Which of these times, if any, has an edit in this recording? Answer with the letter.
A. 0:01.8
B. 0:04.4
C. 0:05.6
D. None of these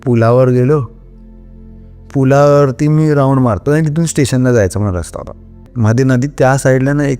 C